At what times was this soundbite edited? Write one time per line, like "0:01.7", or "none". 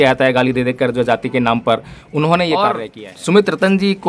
0:02.9